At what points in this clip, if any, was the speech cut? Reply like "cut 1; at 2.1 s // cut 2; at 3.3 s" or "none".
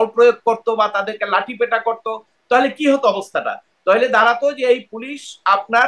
none